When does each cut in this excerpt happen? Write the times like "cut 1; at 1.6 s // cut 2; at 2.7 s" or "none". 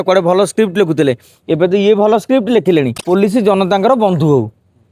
cut 1; at 3.0 s